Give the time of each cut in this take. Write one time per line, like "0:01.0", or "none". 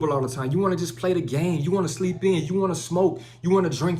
none